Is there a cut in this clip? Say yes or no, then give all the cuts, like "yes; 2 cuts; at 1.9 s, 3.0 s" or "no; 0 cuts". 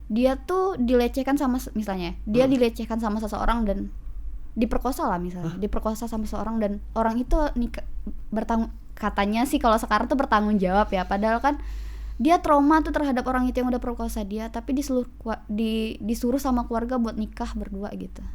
no; 0 cuts